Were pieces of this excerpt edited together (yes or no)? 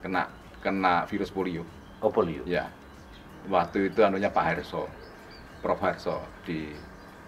no